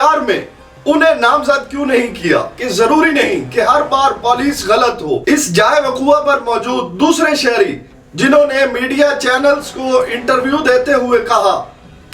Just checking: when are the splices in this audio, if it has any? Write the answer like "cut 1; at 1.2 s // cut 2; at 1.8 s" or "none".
cut 1; at 2.6 s // cut 2; at 5.2 s